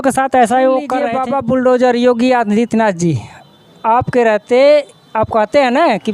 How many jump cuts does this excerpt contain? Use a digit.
1